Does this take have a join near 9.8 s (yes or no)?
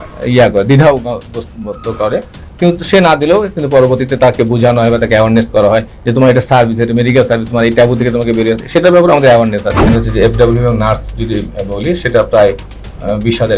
yes